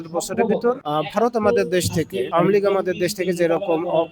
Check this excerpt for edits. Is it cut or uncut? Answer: cut